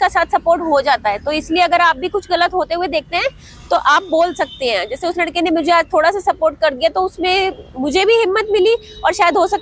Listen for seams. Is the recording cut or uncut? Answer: uncut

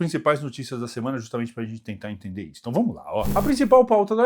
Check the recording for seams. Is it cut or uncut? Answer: uncut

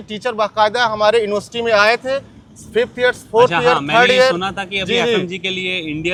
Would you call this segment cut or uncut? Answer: uncut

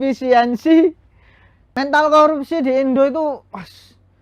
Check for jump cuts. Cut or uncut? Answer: cut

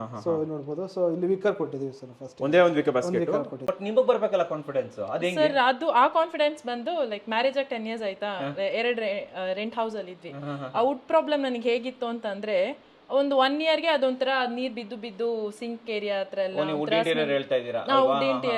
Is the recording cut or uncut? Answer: cut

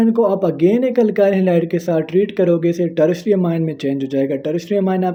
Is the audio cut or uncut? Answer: uncut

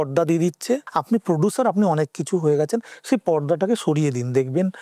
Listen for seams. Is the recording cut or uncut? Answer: cut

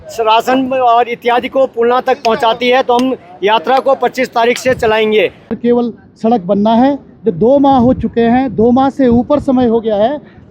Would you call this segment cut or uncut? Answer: cut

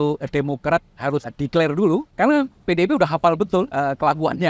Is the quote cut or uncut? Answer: cut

